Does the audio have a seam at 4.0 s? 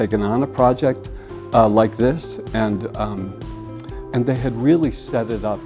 no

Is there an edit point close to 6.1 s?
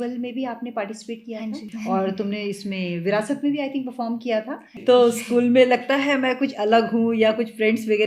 no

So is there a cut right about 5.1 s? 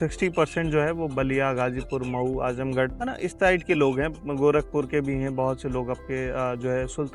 no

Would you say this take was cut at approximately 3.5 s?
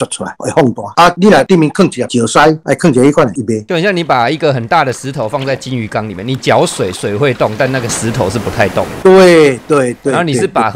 yes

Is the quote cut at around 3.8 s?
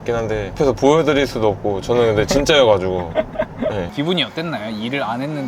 yes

